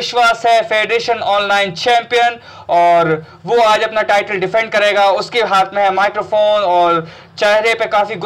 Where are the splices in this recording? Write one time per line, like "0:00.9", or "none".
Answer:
none